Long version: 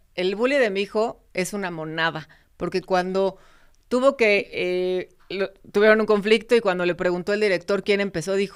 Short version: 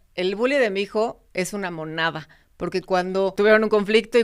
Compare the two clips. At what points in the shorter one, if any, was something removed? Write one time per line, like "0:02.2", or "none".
0:03.3